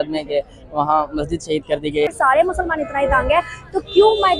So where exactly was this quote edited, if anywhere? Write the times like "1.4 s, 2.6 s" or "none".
2.1 s